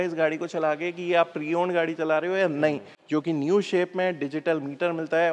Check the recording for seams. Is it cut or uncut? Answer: cut